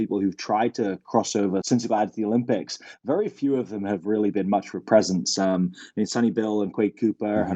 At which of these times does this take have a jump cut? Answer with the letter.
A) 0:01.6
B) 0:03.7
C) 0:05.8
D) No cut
A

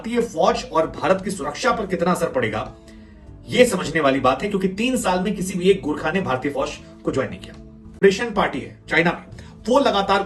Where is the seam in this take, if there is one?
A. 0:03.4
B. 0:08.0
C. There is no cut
B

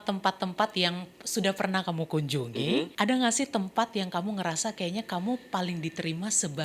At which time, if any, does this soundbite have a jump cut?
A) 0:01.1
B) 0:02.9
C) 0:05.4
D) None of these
B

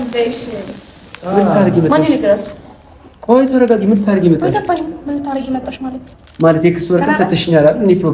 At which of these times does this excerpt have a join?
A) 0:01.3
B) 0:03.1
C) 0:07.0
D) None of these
D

